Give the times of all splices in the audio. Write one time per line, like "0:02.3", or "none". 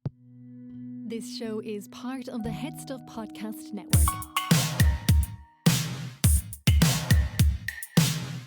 0:01.1
0:03.8